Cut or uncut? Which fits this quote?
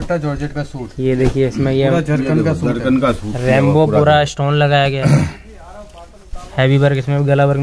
uncut